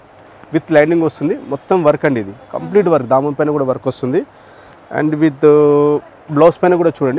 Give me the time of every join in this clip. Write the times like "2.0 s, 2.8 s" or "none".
none